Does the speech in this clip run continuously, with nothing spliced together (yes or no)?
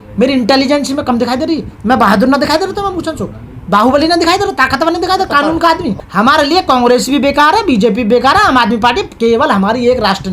no